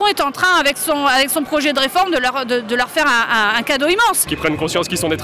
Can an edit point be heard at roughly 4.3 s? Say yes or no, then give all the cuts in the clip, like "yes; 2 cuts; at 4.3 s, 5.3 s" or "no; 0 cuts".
yes; 1 cut; at 4.3 s